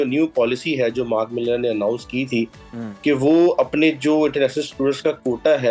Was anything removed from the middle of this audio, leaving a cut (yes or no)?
no